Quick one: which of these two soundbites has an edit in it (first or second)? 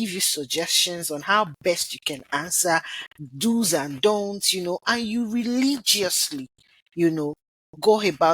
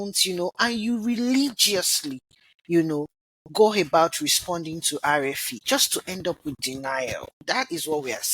second